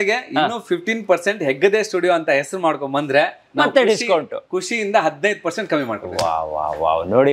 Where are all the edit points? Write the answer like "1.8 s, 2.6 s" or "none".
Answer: none

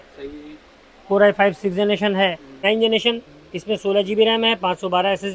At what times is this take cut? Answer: 2.6 s

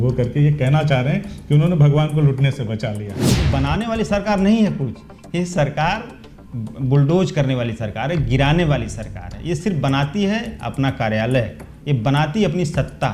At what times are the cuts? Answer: 3.1 s

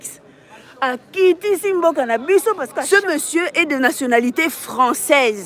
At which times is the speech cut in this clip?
2.7 s

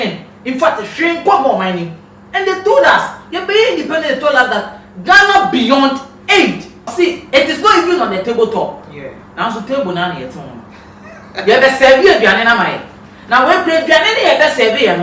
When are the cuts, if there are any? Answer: 6.9 s

